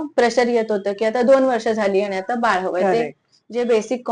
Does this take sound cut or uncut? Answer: uncut